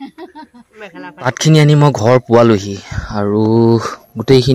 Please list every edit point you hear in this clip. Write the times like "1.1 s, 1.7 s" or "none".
1.3 s